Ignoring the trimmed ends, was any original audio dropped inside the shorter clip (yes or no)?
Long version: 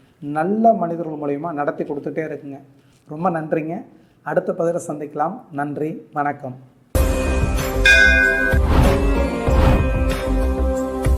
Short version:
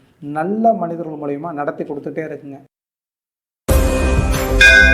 yes